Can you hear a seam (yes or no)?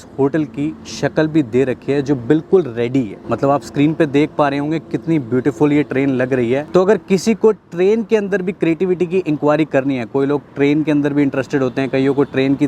no